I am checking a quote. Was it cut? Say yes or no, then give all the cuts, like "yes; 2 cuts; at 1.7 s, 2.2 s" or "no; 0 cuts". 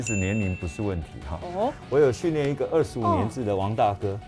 no; 0 cuts